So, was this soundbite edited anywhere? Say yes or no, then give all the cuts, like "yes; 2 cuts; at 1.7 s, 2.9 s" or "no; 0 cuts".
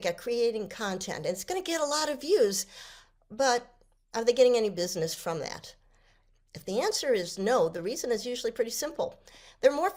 no; 0 cuts